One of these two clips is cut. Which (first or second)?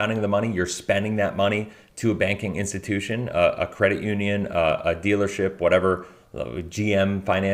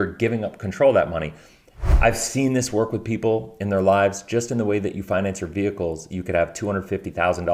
second